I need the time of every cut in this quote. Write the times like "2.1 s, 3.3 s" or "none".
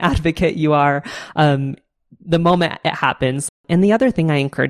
3.5 s